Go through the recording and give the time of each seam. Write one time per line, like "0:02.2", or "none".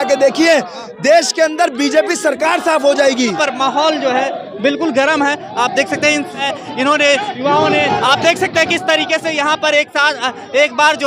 0:03.3
0:06.4